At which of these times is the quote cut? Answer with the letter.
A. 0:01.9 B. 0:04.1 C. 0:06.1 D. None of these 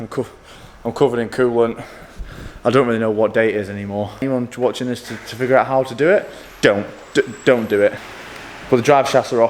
D